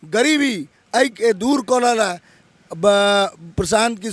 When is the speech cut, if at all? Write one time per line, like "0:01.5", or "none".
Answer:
none